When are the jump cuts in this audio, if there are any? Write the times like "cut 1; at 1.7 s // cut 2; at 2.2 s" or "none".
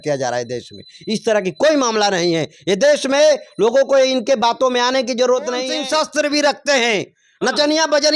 cut 1; at 5.7 s

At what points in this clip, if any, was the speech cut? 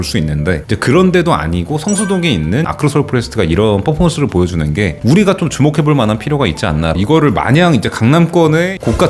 cut 1; at 2.7 s // cut 2; at 7.0 s

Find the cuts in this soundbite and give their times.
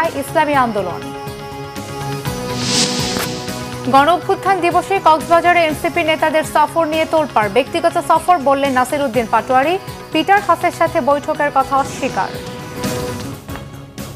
cut 1; at 13.2 s

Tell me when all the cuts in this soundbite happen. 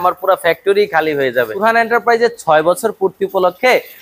cut 1; at 1.6 s

